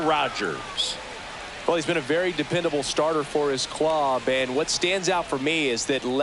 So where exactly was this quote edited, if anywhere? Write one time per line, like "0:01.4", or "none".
0:01.0